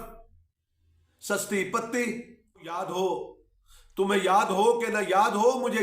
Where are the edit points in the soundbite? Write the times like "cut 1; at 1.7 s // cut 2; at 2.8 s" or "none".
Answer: cut 1; at 2.7 s

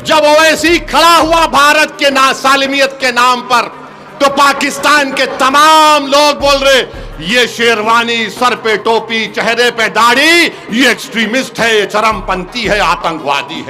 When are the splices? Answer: none

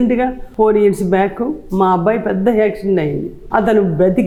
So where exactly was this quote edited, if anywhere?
none

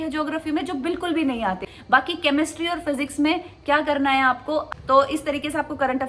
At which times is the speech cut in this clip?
cut 1; at 1.7 s // cut 2; at 4.7 s

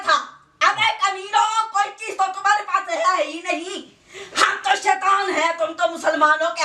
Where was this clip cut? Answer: none

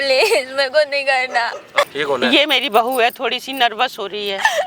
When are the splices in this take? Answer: cut 1; at 1.9 s

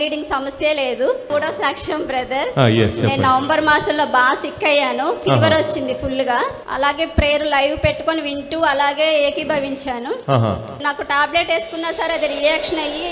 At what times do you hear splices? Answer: cut 1; at 1.3 s // cut 2; at 6.6 s // cut 3; at 10.8 s

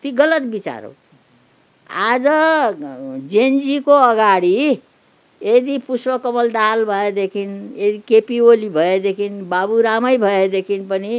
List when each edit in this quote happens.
none

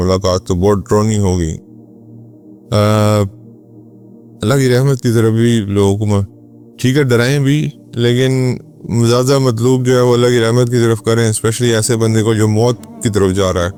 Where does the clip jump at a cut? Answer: none

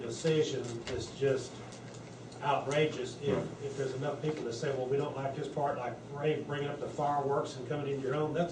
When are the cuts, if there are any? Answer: cut 1; at 4.4 s

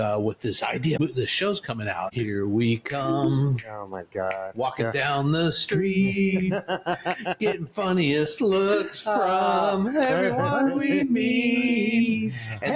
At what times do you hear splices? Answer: cut 1; at 1.0 s // cut 2; at 2.1 s

